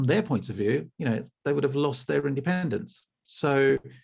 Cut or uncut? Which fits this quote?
uncut